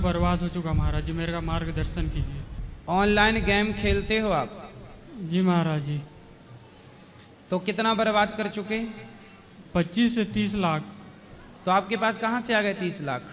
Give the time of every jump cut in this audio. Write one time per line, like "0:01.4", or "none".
none